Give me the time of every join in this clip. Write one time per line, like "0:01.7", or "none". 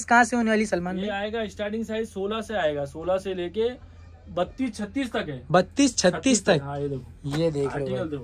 none